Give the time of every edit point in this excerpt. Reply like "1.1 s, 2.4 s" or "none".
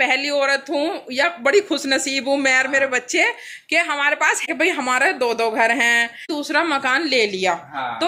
4.4 s, 6.2 s